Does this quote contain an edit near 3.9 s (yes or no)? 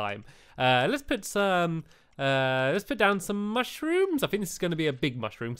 yes